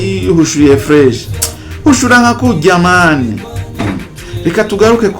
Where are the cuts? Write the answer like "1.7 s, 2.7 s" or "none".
3.8 s